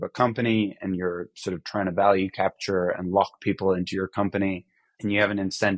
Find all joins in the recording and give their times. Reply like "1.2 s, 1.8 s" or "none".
none